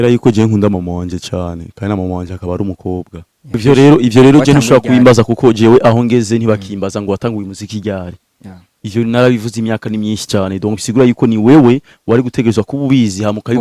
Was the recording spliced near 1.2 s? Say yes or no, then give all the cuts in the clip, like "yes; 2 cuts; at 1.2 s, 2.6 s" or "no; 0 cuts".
no; 1 cut; at 3.6 s